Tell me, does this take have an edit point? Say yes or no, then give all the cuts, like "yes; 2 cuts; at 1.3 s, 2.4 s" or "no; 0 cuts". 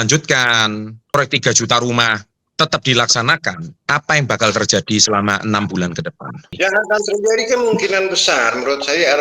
yes; 3 cuts; at 0.9 s, 3.7 s, 6.5 s